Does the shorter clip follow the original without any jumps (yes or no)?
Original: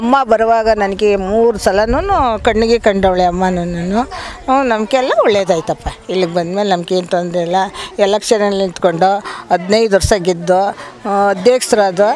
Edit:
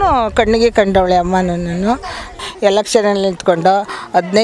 no